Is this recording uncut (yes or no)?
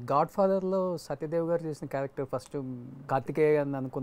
no